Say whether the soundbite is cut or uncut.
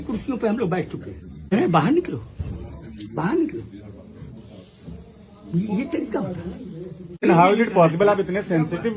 cut